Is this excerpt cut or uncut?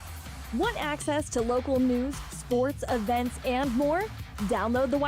cut